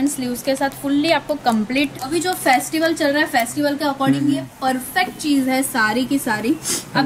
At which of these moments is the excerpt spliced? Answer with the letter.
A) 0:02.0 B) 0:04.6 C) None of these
A